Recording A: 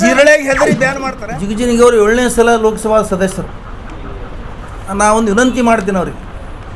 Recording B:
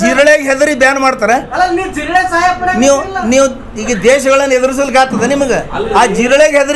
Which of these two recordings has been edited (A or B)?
A